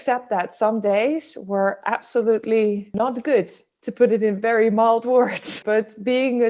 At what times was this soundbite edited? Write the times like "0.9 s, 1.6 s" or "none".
2.9 s, 5.5 s